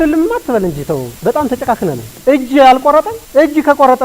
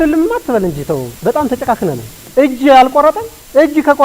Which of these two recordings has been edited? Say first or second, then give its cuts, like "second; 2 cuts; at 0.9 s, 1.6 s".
first; 2 cuts; at 2.1 s, 3.2 s